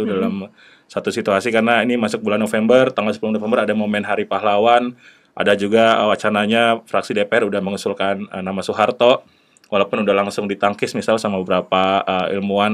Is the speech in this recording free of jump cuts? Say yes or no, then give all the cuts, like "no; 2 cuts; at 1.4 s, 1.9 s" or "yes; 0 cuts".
yes; 0 cuts